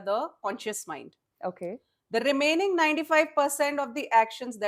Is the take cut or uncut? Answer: uncut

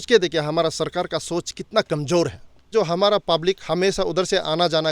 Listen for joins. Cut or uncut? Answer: cut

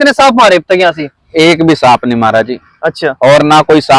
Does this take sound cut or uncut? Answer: uncut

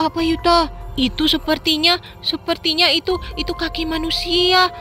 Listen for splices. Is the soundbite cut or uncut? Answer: uncut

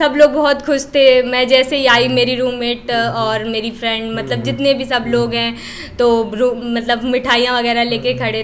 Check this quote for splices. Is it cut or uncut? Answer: uncut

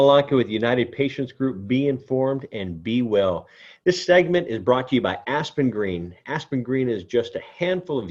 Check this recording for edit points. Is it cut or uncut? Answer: uncut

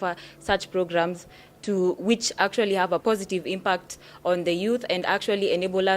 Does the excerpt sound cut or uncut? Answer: cut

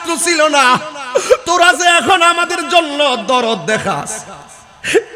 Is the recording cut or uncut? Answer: uncut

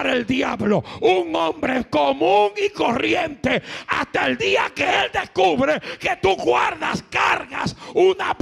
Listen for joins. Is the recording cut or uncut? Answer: uncut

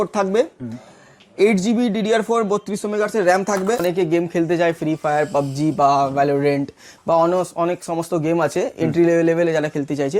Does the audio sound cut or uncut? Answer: cut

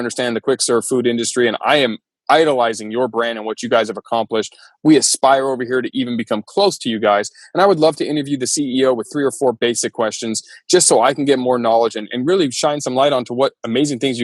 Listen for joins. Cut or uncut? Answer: uncut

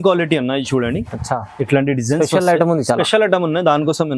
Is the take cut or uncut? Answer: uncut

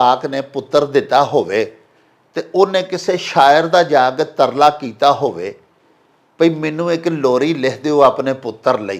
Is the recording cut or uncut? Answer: uncut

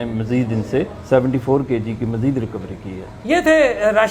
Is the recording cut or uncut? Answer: uncut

